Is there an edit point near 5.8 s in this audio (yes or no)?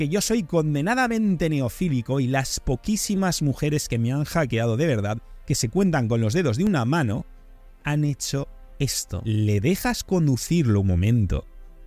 no